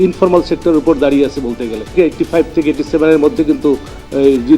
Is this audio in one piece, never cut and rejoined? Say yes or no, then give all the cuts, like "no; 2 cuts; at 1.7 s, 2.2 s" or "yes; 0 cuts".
no; 1 cut; at 1.9 s